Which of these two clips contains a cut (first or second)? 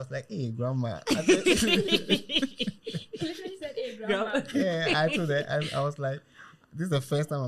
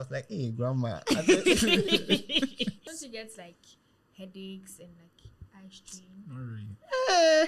second